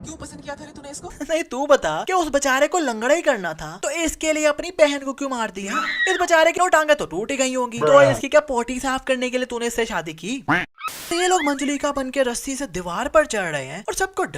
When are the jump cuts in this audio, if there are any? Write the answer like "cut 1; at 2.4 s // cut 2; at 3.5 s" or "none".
cut 1; at 1.1 s // cut 2; at 6.5 s // cut 3; at 11.1 s

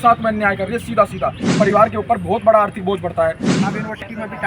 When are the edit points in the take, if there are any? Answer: cut 1; at 1.5 s // cut 2; at 3.5 s

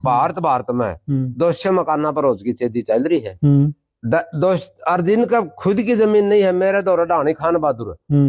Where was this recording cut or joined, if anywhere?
none

